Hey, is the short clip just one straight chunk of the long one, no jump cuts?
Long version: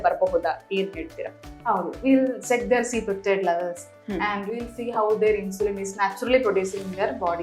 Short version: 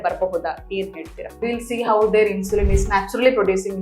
no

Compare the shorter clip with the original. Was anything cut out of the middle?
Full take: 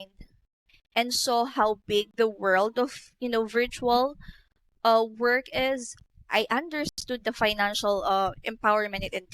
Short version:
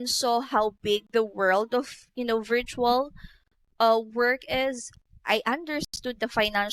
no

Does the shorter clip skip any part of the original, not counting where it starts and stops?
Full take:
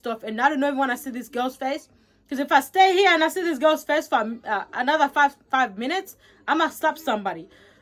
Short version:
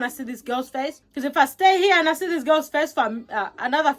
yes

